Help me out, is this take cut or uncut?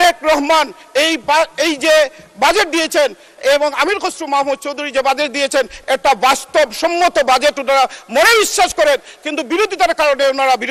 uncut